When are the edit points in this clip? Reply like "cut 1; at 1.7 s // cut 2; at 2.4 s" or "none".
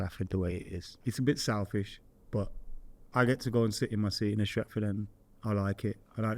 cut 1; at 0.9 s